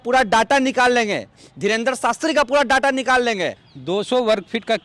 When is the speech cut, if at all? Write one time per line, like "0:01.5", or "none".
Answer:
0:03.7